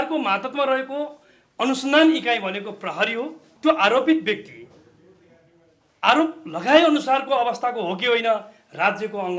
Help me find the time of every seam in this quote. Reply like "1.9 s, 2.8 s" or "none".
3.4 s